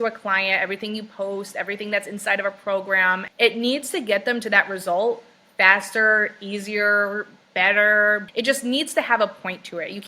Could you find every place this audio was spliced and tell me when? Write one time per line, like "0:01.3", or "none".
0:03.3
0:08.2